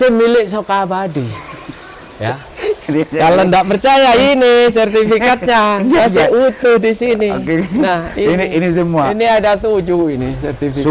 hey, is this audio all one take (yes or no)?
yes